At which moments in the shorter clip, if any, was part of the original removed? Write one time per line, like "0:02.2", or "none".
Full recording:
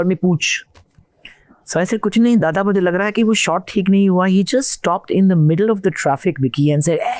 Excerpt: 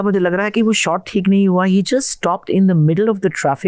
none